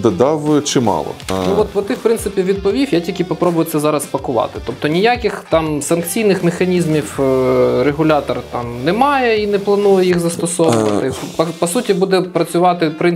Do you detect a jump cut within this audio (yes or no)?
yes